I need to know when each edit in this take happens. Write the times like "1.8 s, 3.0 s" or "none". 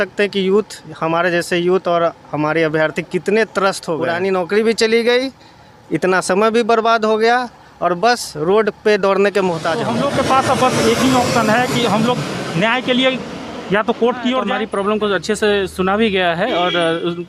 4.0 s, 9.8 s, 14.5 s